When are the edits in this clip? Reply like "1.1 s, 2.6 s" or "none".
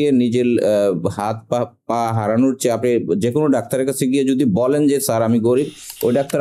none